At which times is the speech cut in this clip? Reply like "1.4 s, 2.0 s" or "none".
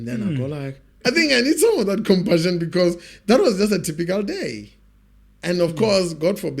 1.0 s